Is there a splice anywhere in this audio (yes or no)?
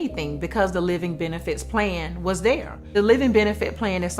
yes